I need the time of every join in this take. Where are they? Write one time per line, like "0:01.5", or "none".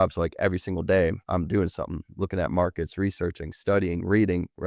0:01.2
0:02.1